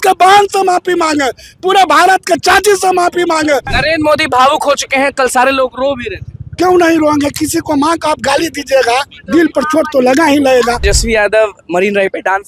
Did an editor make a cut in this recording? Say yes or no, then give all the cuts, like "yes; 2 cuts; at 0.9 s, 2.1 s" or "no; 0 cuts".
yes; 2 cuts; at 3.7 s, 10.9 s